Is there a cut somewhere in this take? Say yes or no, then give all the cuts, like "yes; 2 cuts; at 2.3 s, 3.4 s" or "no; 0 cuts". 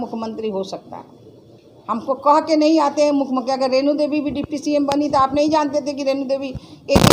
no; 0 cuts